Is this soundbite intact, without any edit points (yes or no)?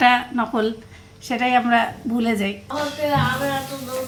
yes